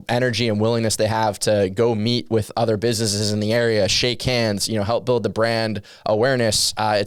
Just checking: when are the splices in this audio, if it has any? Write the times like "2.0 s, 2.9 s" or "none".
none

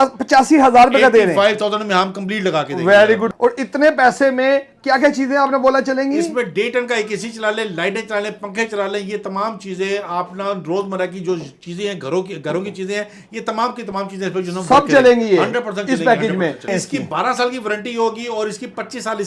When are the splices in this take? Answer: 3.3 s, 16.7 s

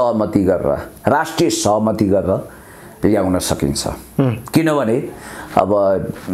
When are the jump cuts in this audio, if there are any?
none

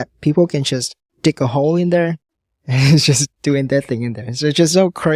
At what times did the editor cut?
none

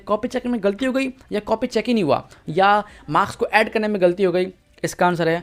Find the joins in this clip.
none

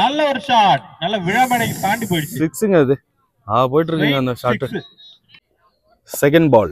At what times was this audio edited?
5.5 s

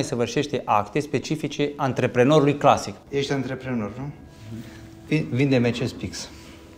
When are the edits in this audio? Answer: 3.0 s

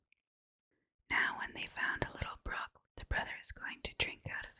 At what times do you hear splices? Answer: 2.8 s

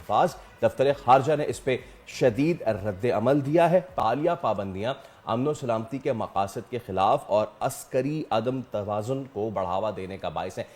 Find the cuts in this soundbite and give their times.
none

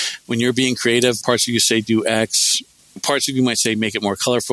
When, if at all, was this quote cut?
1.2 s, 3.0 s

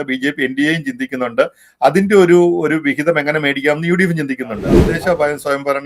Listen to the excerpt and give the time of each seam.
4.9 s

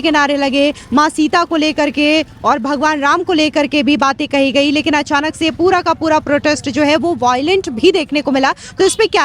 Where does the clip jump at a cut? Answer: none

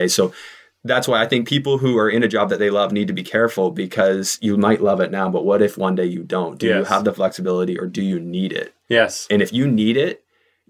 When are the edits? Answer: none

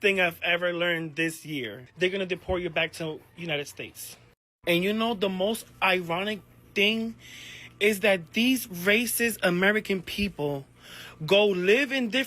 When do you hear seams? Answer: 1.8 s

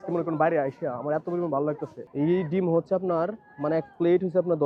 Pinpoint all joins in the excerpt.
2.0 s

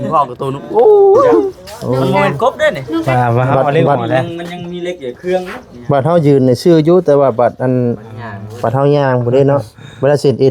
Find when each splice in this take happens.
3.1 s

